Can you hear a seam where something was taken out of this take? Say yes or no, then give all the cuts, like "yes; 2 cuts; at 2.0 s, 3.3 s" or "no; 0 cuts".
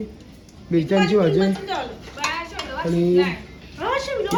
no; 0 cuts